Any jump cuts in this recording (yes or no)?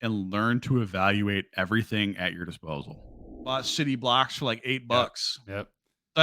yes